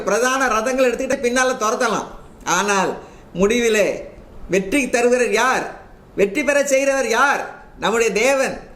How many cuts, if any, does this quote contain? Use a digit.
1